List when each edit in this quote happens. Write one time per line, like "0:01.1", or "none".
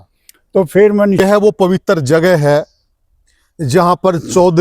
0:01.2

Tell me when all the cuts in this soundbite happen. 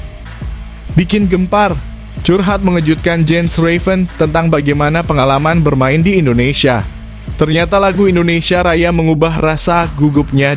0:00.9

